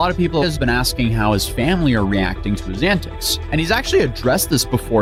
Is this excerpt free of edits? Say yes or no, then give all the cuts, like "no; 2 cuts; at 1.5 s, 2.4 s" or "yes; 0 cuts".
yes; 0 cuts